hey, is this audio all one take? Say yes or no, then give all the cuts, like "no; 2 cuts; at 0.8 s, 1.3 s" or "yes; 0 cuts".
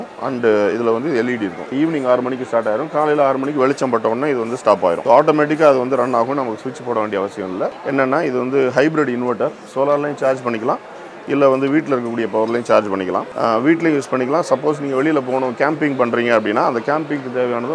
no; 4 cuts; at 1.7 s, 5.0 s, 7.8 s, 13.3 s